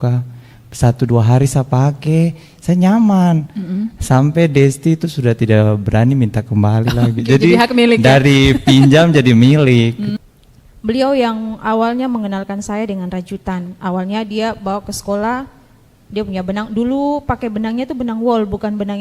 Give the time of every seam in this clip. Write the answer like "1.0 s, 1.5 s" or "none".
10.1 s